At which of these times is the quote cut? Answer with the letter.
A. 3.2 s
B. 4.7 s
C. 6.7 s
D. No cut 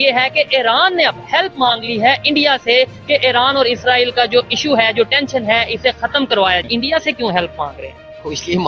C